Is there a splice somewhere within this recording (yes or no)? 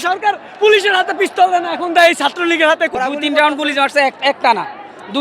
yes